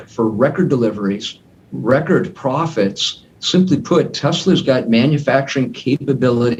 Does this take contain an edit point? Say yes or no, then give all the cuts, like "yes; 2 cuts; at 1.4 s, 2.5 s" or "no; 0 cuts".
no; 0 cuts